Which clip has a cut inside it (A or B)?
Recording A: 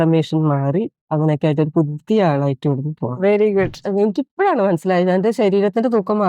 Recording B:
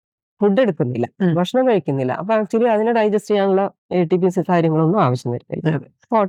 A